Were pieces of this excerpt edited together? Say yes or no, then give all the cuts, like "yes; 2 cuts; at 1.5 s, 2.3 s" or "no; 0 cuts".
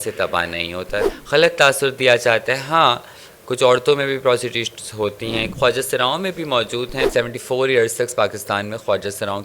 yes; 3 cuts; at 1.1 s, 5.5 s, 7.1 s